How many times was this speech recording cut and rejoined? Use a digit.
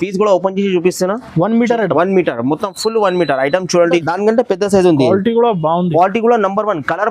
1